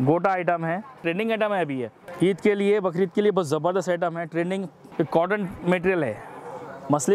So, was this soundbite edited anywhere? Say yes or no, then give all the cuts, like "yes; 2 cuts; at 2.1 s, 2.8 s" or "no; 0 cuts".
yes; 3 cuts; at 1.0 s, 2.0 s, 4.8 s